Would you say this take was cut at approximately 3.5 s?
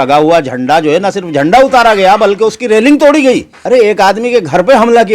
yes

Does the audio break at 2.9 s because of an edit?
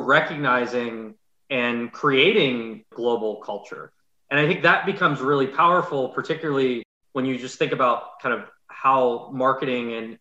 yes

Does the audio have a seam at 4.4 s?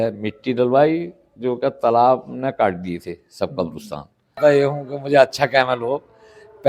yes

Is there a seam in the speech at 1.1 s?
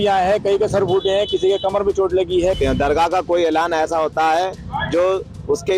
no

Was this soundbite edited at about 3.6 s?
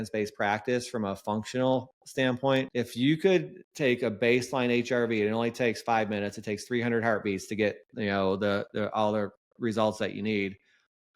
yes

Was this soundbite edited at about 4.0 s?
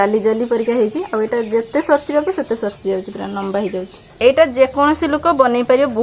yes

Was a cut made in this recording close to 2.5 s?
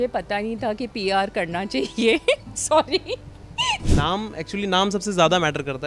no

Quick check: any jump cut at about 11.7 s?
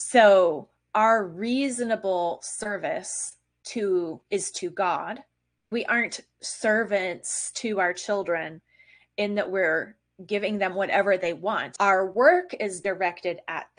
yes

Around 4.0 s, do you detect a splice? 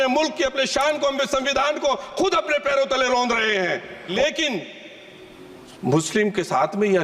yes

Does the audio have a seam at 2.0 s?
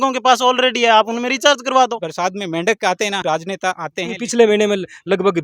yes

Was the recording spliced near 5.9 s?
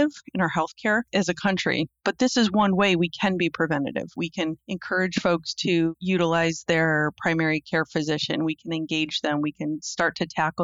yes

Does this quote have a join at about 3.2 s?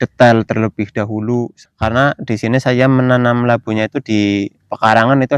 no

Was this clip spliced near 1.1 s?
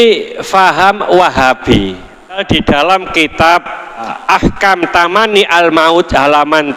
no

